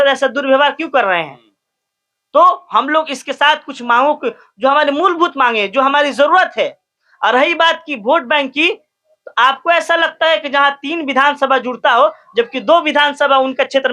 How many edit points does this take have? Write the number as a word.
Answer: zero